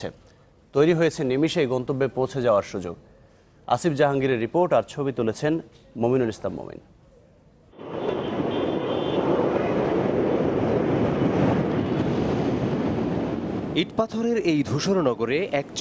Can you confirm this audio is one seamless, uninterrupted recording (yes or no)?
no